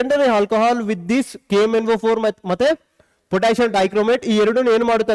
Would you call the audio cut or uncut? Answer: uncut